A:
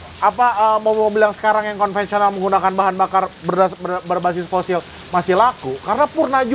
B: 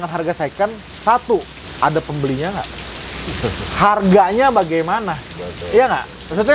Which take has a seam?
B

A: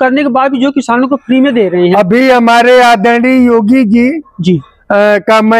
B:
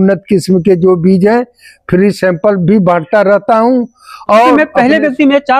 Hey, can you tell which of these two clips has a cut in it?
B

